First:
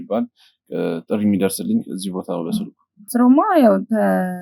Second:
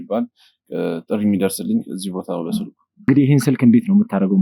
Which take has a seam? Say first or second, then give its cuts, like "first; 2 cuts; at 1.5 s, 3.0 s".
first; 1 cut; at 3.1 s